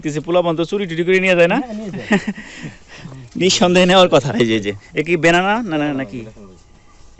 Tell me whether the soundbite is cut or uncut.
uncut